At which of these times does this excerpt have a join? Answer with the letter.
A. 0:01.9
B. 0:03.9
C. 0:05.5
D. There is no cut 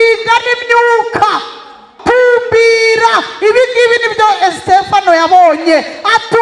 A